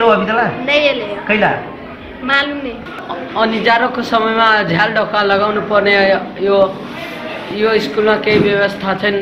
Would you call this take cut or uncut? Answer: cut